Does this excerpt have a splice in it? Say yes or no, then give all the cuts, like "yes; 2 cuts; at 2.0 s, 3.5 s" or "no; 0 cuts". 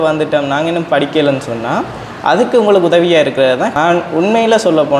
yes; 1 cut; at 3.7 s